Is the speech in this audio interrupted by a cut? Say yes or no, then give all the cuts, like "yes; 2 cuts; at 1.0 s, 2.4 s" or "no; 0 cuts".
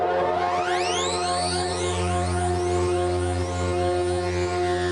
no; 0 cuts